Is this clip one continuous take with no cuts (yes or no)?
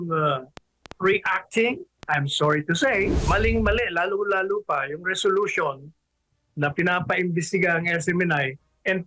no